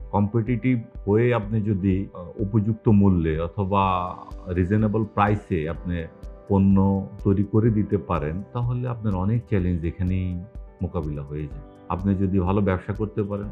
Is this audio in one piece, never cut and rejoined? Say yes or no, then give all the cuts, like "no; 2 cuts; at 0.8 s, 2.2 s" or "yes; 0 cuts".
yes; 0 cuts